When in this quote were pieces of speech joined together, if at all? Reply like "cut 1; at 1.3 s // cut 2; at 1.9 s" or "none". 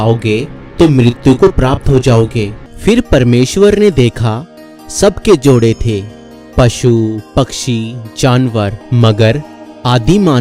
cut 1; at 2.6 s // cut 2; at 8.8 s

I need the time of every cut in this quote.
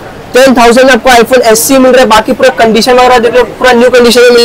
none

